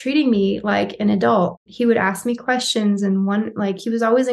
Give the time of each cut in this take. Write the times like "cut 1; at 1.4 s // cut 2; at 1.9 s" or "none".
cut 1; at 1.7 s